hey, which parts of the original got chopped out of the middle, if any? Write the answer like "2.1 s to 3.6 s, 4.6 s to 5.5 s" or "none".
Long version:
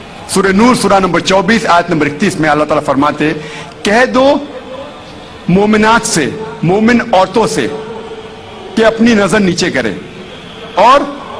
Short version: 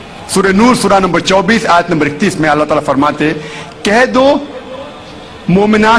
none